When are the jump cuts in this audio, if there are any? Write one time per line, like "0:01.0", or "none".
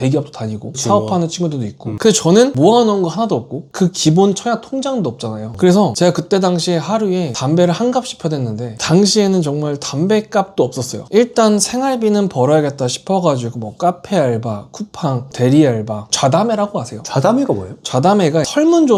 none